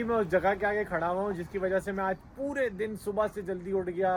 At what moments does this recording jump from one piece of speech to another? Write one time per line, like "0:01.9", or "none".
none